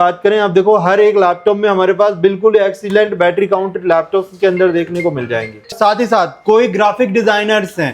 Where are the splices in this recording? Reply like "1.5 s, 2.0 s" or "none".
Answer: 5.7 s